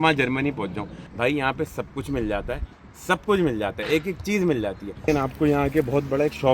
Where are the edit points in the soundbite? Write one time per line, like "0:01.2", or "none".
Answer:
0:01.0
0:05.1